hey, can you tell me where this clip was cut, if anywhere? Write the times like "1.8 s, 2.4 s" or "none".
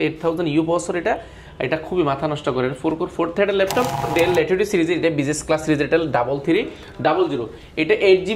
4.1 s

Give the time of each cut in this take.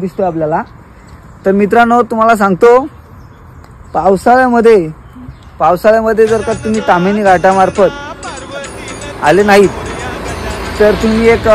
8.6 s

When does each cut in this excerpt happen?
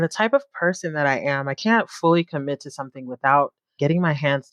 3.6 s

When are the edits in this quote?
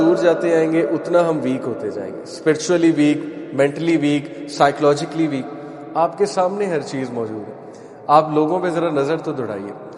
none

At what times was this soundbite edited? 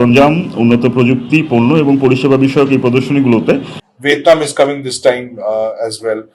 3.8 s

